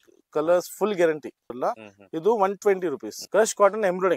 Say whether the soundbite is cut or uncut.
cut